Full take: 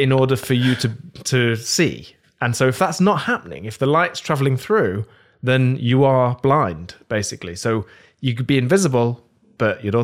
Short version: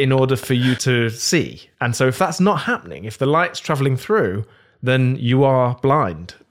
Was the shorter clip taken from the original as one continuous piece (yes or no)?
no